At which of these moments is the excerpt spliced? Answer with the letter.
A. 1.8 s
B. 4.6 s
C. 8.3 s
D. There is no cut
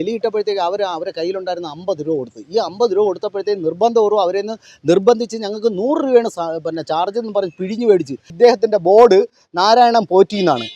C